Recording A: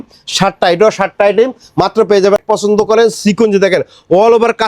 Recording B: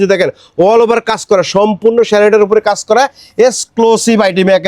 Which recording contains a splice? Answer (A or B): A